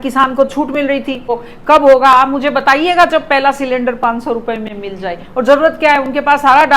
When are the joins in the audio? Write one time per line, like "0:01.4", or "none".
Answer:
0:01.5